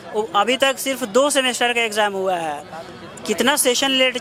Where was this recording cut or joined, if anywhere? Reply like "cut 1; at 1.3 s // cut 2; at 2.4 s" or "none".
none